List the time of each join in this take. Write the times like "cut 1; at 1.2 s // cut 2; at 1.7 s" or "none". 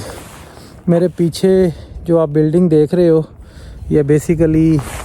none